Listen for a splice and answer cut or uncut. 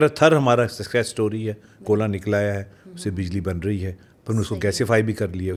uncut